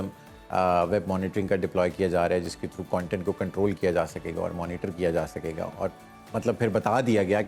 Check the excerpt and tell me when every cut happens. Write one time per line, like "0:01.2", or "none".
none